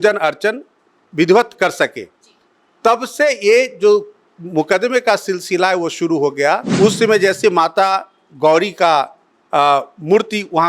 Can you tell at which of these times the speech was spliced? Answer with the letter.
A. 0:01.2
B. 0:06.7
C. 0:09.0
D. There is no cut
B